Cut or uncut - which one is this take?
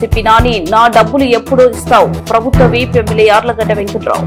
uncut